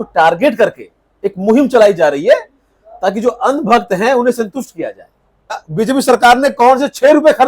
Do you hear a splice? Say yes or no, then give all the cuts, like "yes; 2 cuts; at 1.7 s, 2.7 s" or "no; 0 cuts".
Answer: yes; 1 cut; at 5.6 s